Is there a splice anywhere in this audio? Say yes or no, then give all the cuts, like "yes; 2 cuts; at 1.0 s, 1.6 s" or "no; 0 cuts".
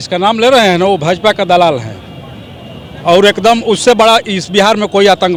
no; 0 cuts